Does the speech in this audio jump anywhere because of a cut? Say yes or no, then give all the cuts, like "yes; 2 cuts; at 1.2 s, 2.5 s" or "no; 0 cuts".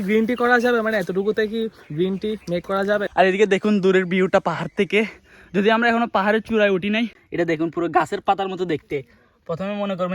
yes; 2 cuts; at 3.1 s, 7.2 s